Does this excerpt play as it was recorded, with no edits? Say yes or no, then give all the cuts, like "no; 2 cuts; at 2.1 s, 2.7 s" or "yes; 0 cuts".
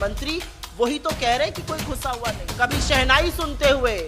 no; 1 cut; at 2.4 s